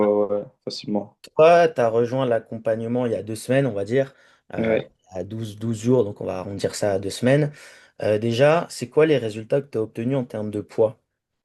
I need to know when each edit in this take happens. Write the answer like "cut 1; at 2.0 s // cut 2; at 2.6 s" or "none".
cut 1; at 1.3 s